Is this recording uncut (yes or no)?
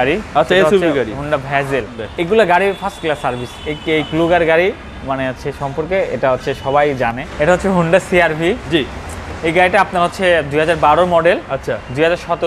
no